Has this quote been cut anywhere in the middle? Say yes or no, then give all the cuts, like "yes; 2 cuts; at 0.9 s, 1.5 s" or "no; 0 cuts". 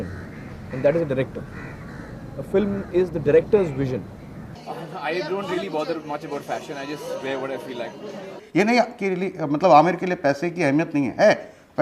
yes; 2 cuts; at 4.6 s, 8.4 s